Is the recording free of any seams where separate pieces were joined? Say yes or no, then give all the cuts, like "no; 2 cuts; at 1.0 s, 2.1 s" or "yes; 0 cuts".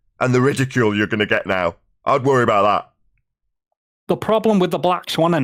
yes; 0 cuts